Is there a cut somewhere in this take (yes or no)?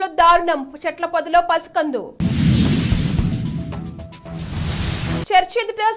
no